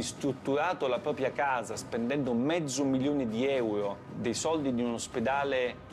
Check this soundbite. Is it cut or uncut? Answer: cut